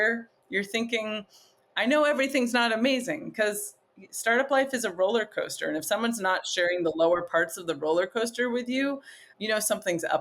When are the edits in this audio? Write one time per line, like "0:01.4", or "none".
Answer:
0:09.3